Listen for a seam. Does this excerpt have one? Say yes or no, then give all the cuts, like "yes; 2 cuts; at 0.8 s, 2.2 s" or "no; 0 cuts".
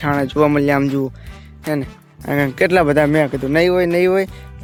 no; 0 cuts